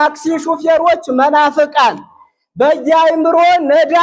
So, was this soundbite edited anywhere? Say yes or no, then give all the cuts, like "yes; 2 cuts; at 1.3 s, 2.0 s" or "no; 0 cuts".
no; 0 cuts